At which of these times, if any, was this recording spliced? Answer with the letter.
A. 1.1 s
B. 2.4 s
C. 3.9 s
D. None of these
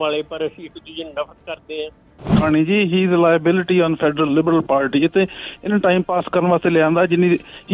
B